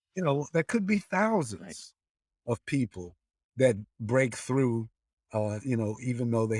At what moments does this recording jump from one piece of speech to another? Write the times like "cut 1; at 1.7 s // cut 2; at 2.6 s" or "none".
none